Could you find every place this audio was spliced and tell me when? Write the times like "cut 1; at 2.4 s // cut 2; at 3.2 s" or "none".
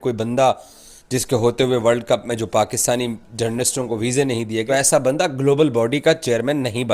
cut 1; at 4.6 s